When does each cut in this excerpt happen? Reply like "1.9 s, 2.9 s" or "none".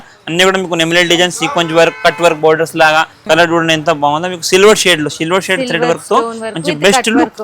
3.2 s